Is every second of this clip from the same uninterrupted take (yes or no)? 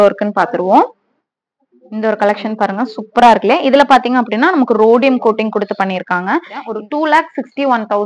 no